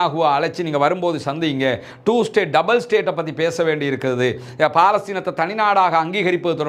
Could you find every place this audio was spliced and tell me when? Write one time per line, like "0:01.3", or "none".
none